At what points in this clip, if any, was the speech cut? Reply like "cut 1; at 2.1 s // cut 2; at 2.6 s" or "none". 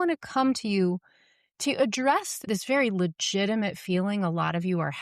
cut 1; at 2.4 s